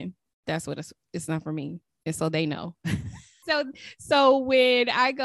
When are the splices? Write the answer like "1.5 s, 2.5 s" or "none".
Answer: 3.4 s